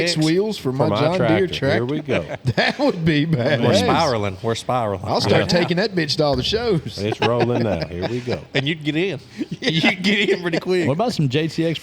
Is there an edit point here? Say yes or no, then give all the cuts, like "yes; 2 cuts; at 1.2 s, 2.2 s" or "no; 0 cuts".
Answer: no; 0 cuts